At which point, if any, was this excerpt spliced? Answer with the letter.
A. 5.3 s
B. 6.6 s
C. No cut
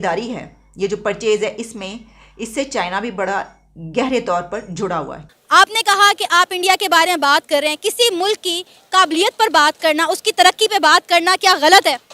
A